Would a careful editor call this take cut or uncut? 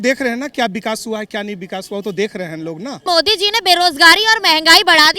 cut